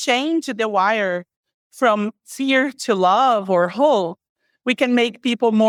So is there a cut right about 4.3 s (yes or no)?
no